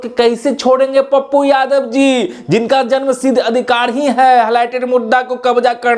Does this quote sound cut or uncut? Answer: uncut